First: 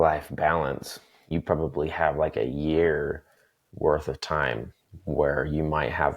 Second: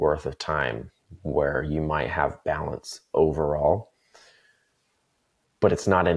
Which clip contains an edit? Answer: first; 1 cut; at 1.3 s

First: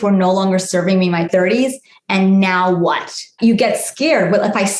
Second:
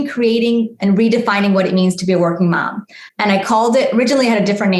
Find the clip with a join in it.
first; 2 cuts; at 1.3 s, 3.2 s

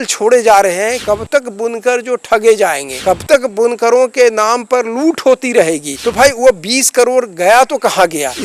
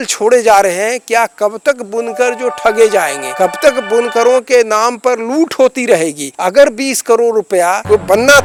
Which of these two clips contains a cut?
first; 2 cuts; at 1.0 s, 5.9 s

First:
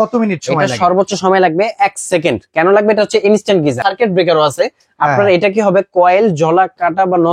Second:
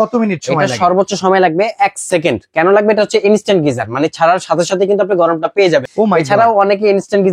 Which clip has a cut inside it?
first; 1 cut; at 3.8 s

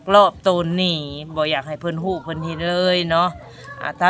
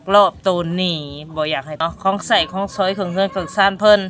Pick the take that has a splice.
second; 1 cut; at 1.8 s

